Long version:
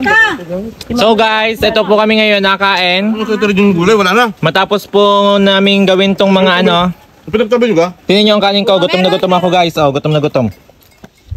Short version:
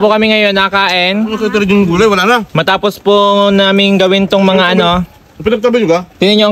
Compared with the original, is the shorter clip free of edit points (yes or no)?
yes